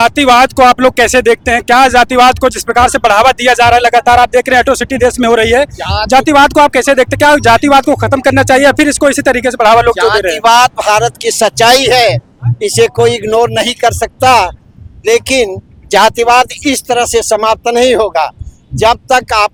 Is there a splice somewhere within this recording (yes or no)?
no